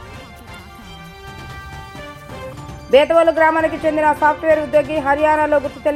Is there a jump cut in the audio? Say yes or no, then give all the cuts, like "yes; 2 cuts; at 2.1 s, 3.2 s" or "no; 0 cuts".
no; 0 cuts